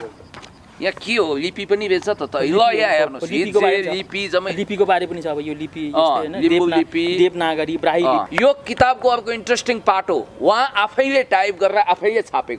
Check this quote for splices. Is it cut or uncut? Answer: cut